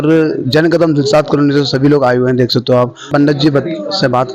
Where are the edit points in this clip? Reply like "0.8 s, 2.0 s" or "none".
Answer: 3.1 s